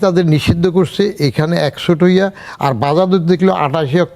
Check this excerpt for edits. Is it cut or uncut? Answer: uncut